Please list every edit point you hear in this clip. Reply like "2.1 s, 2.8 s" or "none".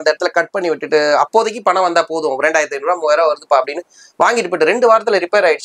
none